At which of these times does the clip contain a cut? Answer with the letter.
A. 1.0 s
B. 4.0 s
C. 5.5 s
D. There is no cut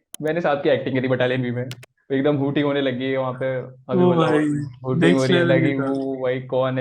D